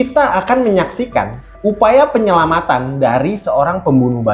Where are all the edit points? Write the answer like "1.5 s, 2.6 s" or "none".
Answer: 1.4 s